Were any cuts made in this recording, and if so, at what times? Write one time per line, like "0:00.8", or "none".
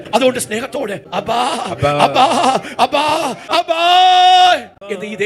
none